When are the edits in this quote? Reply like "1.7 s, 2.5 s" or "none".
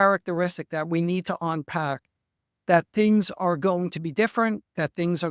none